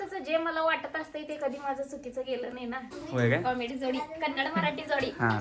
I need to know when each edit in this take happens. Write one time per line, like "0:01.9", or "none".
0:03.4